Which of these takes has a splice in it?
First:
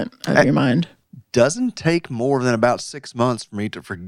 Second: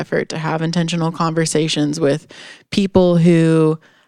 first; 1 cut; at 1.0 s

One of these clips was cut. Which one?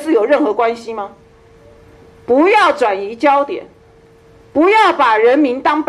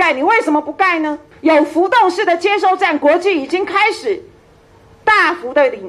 second; 1 cut; at 1.2 s

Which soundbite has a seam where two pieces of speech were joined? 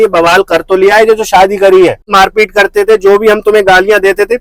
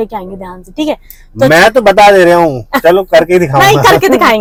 first; 1 cut; at 2.1 s

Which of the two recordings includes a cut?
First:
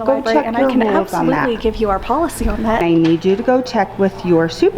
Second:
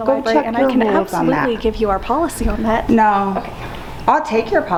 first; 1 cut; at 2.8 s

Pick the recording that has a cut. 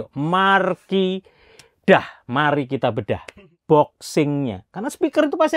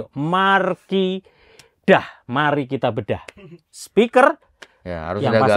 first; 1 cut; at 3.5 s

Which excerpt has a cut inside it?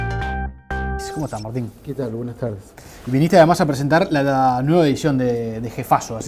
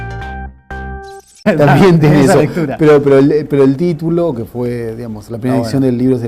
first; 1 cut; at 1.1 s

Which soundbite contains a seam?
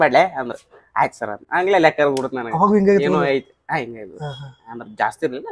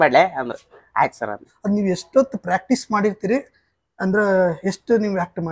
second; 1 cut; at 1.4 s

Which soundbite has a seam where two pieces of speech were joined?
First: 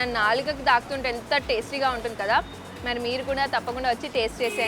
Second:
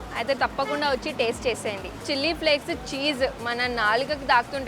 second; 1 cut; at 2.0 s

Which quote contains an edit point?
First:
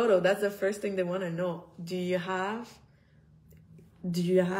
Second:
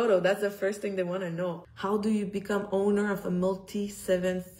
second; 1 cut; at 1.7 s

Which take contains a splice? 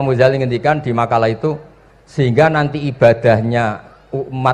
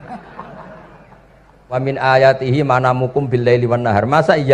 second; 1 cut; at 1.8 s

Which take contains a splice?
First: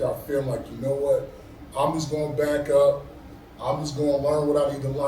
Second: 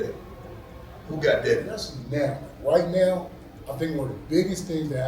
second; 1 cut; at 2.0 s

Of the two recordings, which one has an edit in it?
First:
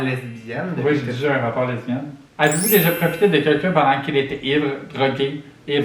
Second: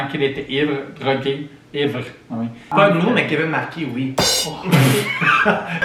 first; 1 cut; at 2.1 s

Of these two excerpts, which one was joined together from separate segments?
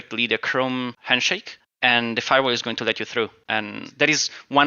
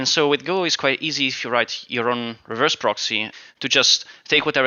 first; 2 cuts; at 1.1 s, 3.4 s

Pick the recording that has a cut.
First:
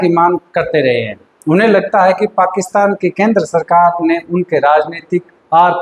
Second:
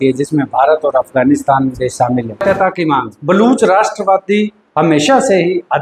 second; 1 cut; at 2.4 s

